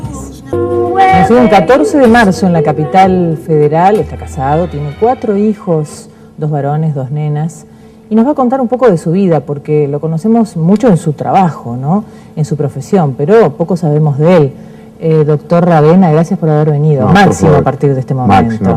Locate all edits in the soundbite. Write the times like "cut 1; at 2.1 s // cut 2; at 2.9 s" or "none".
cut 1; at 4.1 s